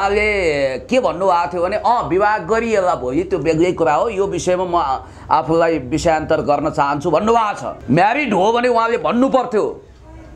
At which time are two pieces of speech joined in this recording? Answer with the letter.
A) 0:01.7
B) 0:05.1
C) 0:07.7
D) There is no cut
C